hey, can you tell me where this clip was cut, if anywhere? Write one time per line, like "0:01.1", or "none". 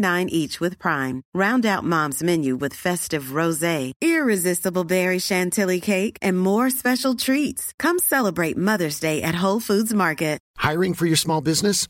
0:10.4